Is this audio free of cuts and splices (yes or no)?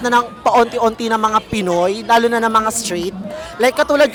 yes